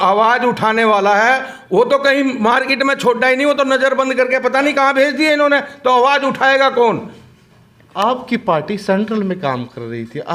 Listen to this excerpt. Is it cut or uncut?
uncut